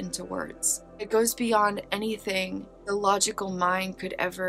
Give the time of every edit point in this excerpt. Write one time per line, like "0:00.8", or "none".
0:01.1
0:02.7